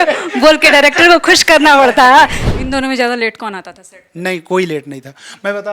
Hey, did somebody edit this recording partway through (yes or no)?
yes